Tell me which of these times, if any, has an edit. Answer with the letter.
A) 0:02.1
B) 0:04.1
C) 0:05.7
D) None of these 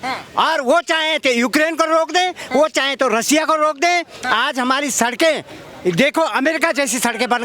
B